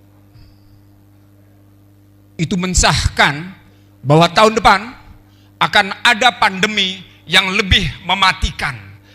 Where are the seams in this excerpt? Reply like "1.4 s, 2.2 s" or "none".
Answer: none